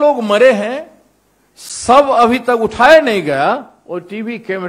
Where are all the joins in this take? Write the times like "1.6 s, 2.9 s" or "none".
3.8 s